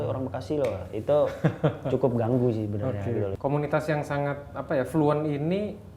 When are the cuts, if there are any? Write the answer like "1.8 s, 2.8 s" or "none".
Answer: 3.3 s